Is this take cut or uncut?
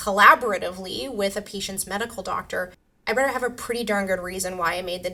uncut